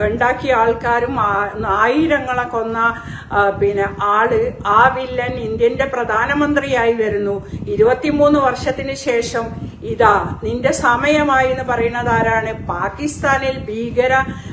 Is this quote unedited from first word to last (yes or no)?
yes